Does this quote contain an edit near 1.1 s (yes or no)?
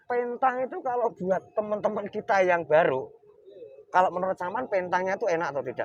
no